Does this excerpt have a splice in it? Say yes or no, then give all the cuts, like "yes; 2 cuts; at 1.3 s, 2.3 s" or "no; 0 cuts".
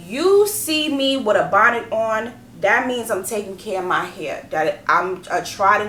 no; 0 cuts